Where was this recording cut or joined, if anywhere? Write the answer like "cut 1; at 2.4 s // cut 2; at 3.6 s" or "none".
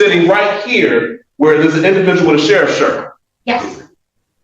none